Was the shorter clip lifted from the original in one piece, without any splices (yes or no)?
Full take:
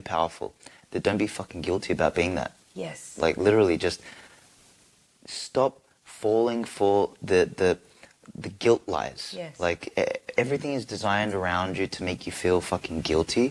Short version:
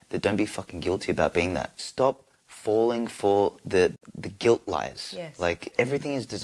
no